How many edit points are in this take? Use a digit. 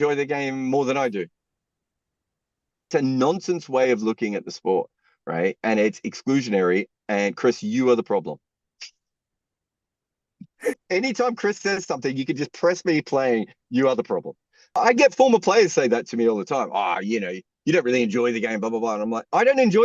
3